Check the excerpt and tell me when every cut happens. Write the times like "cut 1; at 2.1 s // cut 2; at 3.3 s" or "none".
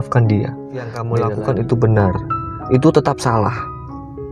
cut 1; at 1.0 s